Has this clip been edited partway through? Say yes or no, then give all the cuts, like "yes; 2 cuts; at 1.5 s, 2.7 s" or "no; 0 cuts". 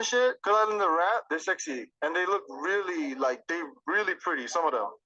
yes; 1 cut; at 3.7 s